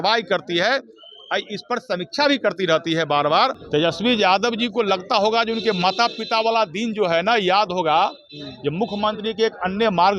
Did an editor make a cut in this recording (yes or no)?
yes